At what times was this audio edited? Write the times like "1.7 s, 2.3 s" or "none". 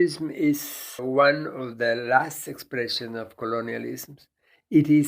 1.0 s